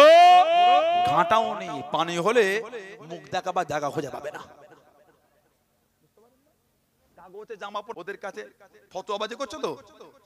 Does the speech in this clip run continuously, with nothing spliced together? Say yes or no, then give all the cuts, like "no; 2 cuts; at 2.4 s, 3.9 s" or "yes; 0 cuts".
no; 1 cut; at 7.6 s